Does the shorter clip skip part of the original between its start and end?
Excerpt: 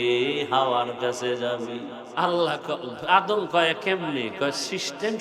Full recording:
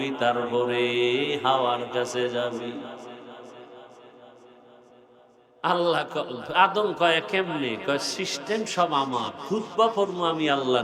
yes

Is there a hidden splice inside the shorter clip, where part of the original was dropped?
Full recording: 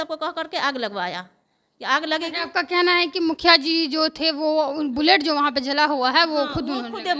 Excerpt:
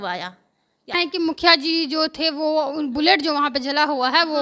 yes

